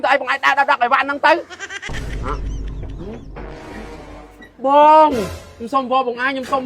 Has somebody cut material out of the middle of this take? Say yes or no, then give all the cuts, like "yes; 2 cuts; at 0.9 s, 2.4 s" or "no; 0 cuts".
yes; 1 cut; at 1.6 s